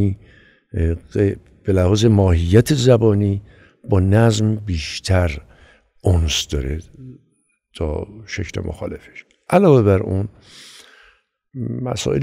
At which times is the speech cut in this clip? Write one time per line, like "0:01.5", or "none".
none